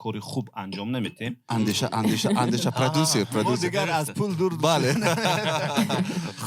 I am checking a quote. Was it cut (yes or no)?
yes